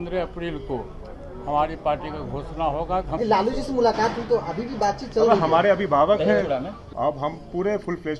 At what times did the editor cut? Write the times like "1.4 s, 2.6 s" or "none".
3.2 s, 6.8 s